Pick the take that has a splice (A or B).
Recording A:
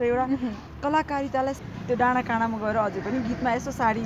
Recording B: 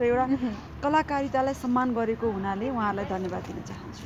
A